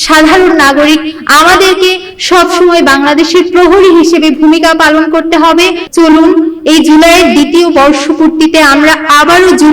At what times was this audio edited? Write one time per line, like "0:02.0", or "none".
0:05.8